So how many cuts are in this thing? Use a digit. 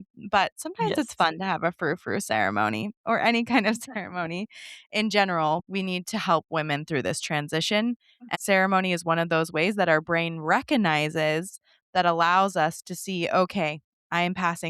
2